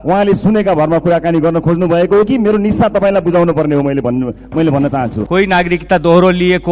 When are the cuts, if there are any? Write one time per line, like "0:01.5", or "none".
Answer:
0:05.2